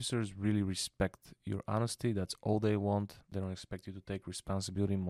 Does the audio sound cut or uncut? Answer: cut